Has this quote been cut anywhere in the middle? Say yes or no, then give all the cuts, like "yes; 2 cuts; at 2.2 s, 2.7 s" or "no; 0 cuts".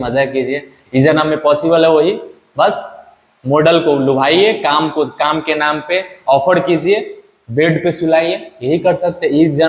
no; 0 cuts